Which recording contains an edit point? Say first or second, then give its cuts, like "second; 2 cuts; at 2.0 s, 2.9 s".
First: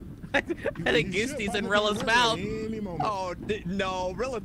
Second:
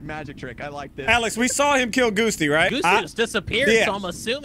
second; 2 cuts; at 0.9 s, 2.7 s